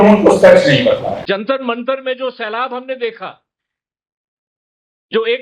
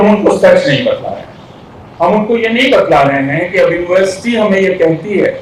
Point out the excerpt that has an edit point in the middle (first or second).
first